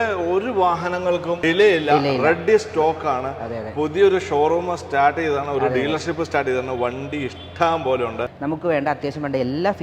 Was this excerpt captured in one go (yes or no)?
no